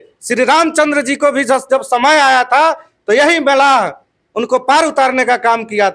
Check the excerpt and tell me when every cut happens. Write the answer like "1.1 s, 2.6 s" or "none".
none